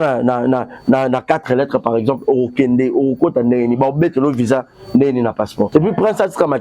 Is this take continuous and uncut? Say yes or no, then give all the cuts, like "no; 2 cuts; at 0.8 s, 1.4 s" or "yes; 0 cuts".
no; 1 cut; at 5.7 s